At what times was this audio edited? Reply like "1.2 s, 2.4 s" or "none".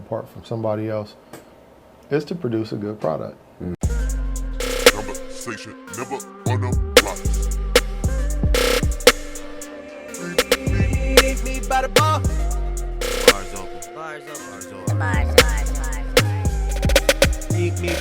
3.8 s